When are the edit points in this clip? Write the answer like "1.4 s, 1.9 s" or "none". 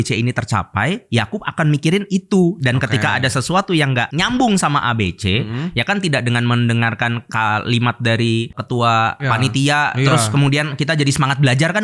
none